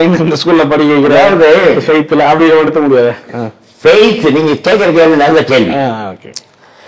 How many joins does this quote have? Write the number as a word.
zero